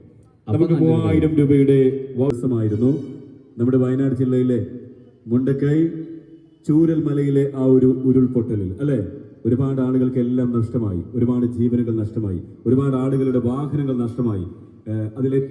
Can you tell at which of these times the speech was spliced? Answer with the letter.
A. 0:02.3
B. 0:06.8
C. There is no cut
A